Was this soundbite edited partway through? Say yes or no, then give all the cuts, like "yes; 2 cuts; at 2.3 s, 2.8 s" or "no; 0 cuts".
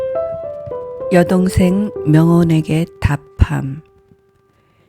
yes; 1 cut; at 1.0 s